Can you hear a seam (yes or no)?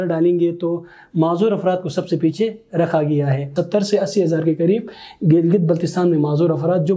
yes